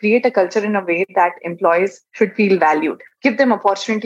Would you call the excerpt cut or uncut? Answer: cut